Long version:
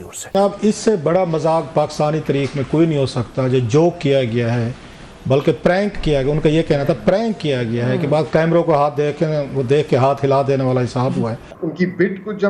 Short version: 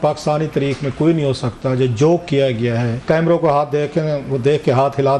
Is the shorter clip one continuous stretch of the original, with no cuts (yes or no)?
no